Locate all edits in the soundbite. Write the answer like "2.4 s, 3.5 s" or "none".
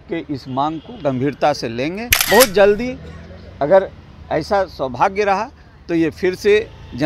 2.1 s

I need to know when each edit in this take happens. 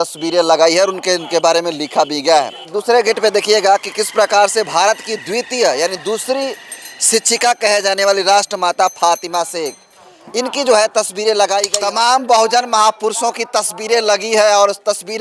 2.7 s, 11.7 s

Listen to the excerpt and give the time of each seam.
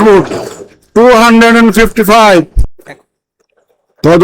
2.6 s

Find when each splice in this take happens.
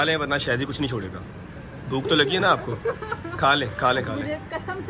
none

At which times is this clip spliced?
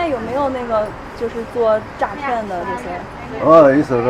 none

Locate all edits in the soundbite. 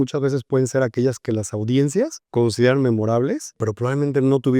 2.2 s, 3.6 s

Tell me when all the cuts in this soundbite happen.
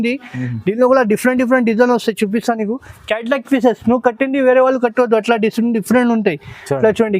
none

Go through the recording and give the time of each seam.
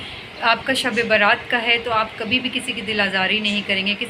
none

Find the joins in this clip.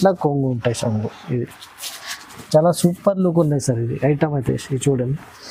none

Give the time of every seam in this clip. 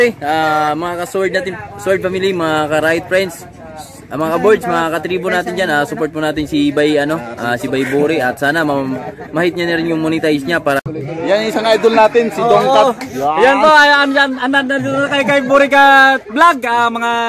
10.8 s

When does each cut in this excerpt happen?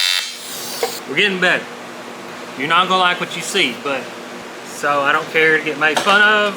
1.0 s, 2.3 s, 4.4 s

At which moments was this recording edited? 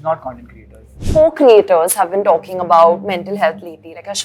0.9 s

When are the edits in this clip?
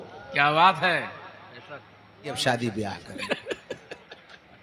2.4 s

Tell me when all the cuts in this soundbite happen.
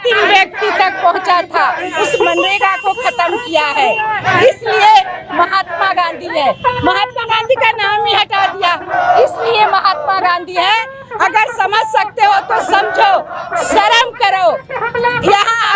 none

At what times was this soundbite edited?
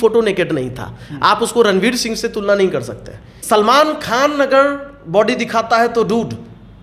3.4 s

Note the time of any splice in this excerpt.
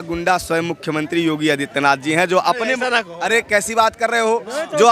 none

